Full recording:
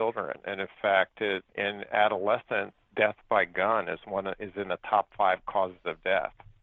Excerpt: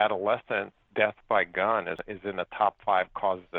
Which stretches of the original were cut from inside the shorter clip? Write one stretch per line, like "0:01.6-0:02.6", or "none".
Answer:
0:04.0-0:04.3

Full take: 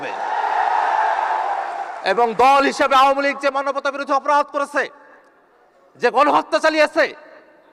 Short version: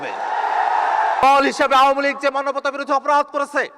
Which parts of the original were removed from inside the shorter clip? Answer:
0:01.2-0:02.4

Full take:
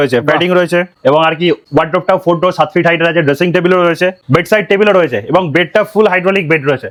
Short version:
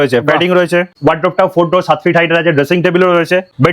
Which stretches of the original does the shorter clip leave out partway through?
0:00.9-0:01.6

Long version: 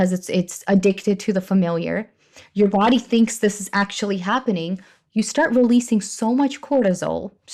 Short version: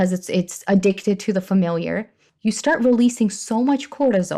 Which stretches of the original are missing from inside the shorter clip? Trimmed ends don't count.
0:02.2-0:04.9

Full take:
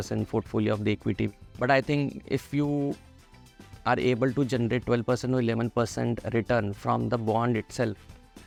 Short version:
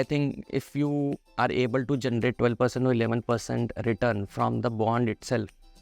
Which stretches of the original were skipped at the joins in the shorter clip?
0:03.0-0:03.7

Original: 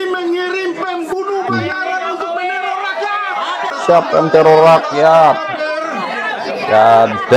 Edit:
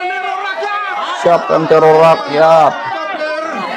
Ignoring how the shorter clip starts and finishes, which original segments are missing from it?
0:03.6-0:03.9

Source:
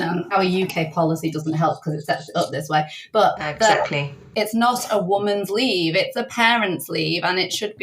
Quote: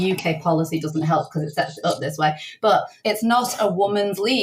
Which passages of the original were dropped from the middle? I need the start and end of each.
0:03.4-0:04.2

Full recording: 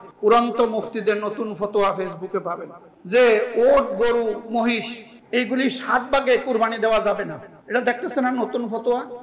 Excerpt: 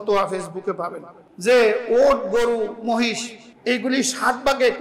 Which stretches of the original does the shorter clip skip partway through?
none

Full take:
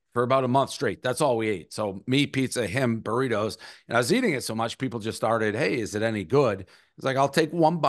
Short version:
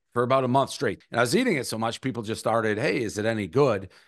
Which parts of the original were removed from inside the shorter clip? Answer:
0:01.0-0:03.7

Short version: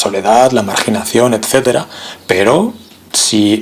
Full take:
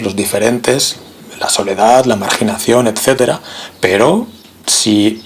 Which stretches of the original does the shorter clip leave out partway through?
none

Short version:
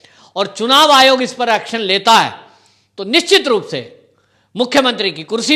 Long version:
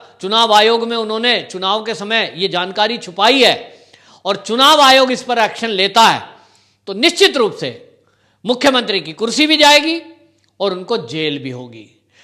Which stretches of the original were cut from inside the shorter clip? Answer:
none

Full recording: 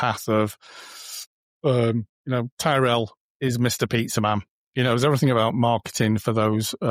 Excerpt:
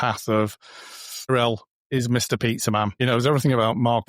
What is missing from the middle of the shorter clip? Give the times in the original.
0:01.3-0:02.8
0:04.4-0:04.7

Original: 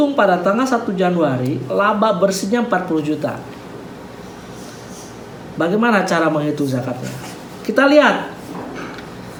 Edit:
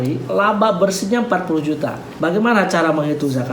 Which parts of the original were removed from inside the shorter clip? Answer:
0:03.5-0:05.4

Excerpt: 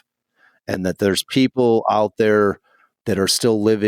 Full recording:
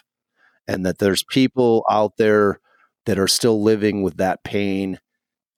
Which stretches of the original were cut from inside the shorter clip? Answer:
none

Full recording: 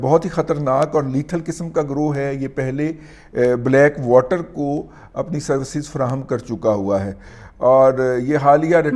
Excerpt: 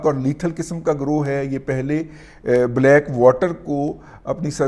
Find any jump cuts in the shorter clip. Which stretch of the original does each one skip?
none

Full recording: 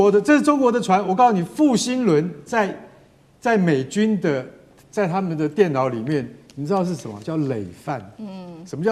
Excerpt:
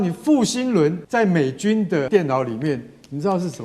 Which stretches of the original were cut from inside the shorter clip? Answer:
0:02.3-0:03.3
0:04.4-0:05.5

